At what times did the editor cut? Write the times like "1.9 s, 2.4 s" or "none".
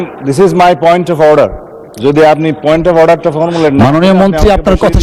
none